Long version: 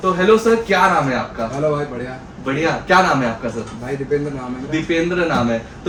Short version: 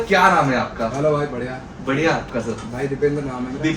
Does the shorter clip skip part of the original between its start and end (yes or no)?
yes